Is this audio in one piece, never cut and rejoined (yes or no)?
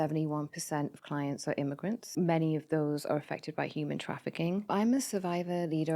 no